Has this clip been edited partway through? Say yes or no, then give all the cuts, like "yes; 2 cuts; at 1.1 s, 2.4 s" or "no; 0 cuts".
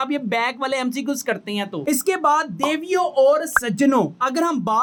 no; 0 cuts